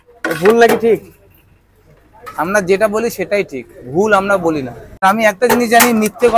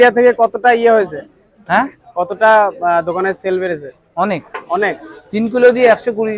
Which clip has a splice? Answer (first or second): first